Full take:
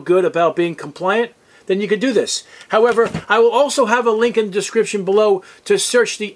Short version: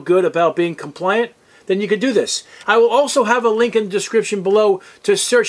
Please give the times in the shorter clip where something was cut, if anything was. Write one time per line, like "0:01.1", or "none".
0:02.6